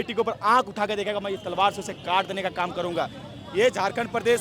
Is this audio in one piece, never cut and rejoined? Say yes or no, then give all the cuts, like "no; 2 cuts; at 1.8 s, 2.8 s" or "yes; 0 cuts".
yes; 0 cuts